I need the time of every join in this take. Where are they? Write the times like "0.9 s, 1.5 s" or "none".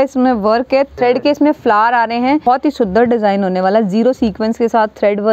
0.9 s, 2.4 s